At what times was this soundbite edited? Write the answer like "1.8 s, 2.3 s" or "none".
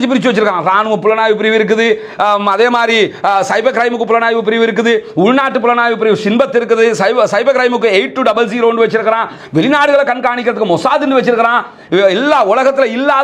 none